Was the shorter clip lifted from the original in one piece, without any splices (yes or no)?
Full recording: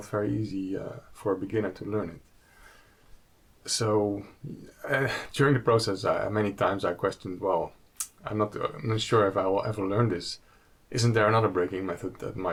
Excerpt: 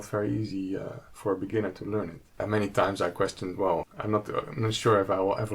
no